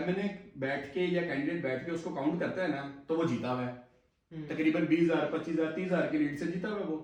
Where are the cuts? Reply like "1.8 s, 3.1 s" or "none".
none